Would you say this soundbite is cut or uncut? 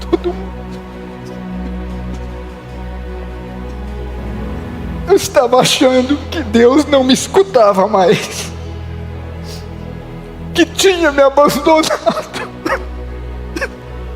cut